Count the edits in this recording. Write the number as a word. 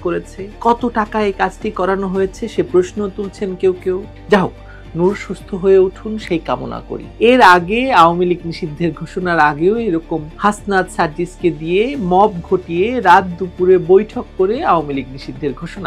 two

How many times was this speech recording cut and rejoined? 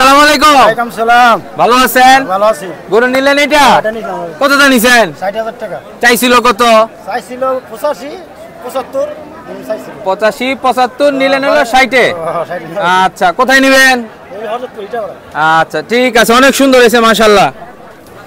zero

